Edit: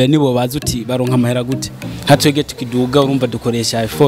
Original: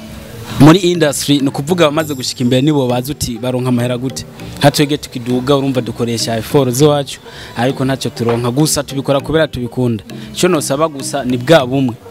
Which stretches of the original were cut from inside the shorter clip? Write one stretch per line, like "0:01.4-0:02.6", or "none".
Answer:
none